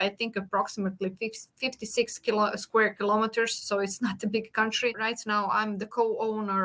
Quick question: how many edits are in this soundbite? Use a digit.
1